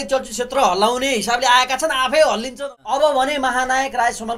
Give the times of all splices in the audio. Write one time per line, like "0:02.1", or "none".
0:02.5